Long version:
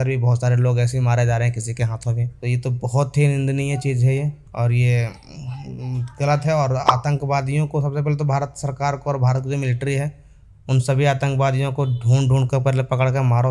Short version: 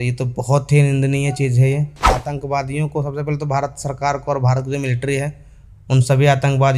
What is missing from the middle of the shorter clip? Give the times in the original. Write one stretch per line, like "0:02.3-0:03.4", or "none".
0:04.6-0:06.9